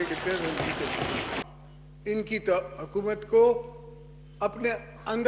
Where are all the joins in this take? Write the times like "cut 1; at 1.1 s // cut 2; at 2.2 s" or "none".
cut 1; at 1.4 s